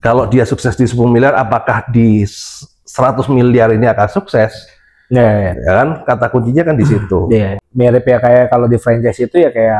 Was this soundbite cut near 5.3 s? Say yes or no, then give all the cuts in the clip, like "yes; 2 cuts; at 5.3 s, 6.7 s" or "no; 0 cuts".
no; 1 cut; at 7.6 s